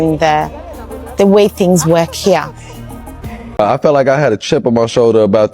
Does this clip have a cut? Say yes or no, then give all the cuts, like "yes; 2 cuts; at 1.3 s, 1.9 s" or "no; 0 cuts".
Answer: yes; 1 cut; at 3.6 s